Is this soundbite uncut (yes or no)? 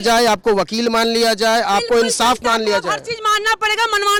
yes